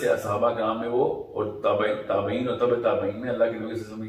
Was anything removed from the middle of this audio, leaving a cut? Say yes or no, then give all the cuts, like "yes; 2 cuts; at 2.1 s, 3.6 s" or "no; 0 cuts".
no; 0 cuts